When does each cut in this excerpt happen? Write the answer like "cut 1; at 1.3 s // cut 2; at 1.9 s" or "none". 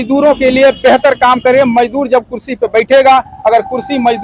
none

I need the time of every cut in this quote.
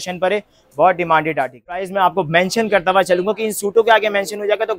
cut 1; at 1.9 s

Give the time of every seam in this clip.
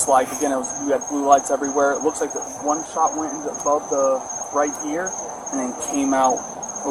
none

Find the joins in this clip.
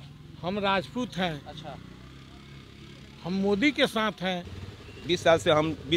cut 1; at 4.5 s

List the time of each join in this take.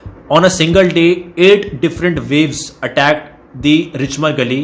none

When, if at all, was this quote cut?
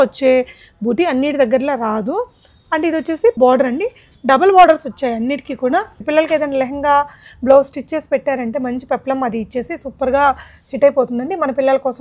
cut 1; at 3.4 s // cut 2; at 6.0 s

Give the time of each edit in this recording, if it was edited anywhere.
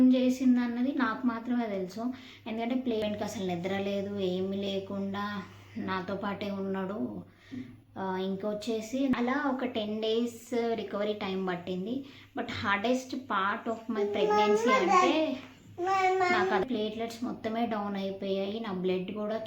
cut 1; at 3.0 s // cut 2; at 9.1 s // cut 3; at 16.6 s

